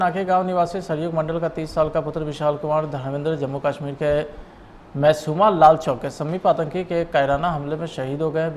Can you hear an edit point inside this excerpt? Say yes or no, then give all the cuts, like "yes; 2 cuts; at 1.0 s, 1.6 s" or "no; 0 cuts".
no; 0 cuts